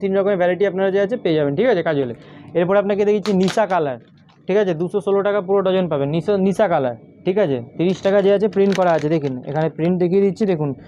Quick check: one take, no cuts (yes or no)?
yes